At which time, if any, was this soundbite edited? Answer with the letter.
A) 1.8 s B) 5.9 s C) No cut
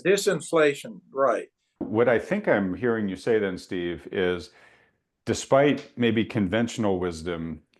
A